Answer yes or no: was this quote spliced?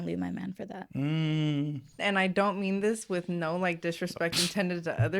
yes